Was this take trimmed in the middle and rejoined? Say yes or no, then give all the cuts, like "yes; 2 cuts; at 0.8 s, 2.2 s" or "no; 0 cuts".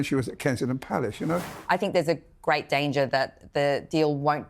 yes; 1 cut; at 1.5 s